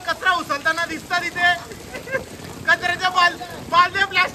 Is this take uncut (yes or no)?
yes